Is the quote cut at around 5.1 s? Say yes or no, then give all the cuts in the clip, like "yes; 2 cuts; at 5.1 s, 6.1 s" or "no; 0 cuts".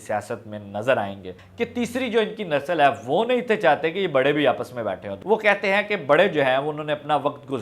yes; 2 cuts; at 1.4 s, 5.1 s